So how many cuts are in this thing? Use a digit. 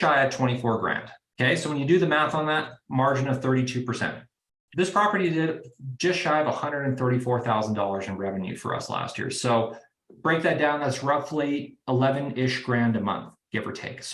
1